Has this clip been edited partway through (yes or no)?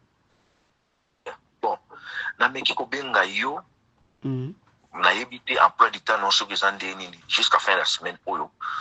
no